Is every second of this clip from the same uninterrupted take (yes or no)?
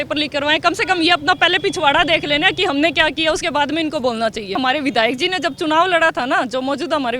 no